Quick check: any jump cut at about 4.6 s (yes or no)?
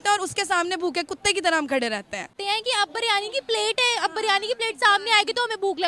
no